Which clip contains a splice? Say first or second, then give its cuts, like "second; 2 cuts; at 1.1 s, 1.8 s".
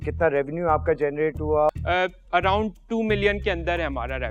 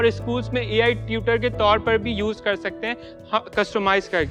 first; 1 cut; at 1.7 s